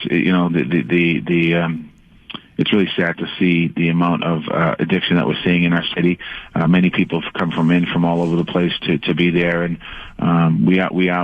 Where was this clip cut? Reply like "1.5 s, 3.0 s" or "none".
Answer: 4.5 s, 9.8 s